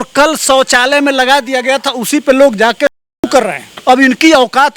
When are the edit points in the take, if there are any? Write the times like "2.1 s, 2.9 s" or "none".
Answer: 3.6 s